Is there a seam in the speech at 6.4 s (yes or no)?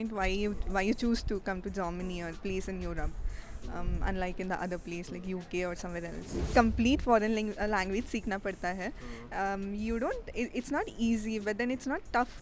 yes